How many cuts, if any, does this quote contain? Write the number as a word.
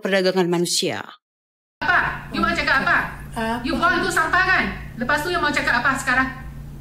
one